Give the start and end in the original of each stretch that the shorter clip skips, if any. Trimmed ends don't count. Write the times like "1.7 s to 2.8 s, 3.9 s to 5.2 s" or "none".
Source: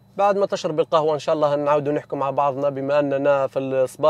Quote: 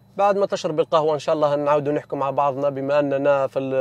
none